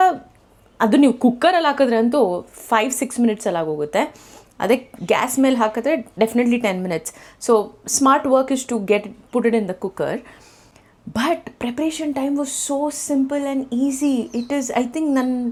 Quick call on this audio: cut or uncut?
uncut